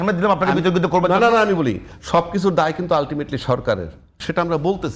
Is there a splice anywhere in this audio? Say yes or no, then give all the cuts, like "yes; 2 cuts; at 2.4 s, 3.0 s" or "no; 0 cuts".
no; 0 cuts